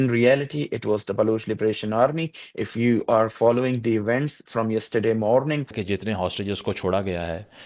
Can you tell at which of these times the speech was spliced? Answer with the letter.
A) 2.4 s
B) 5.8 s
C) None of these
B